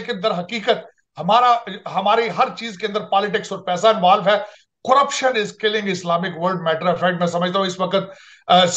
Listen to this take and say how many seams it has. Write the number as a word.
zero